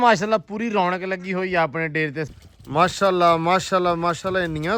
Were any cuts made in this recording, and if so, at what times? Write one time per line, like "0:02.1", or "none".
0:02.3